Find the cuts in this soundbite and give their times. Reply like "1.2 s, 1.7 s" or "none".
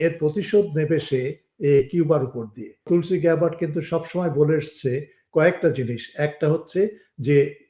2.8 s